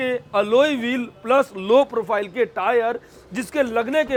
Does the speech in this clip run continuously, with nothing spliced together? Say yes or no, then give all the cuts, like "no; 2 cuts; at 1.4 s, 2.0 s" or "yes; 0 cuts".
yes; 0 cuts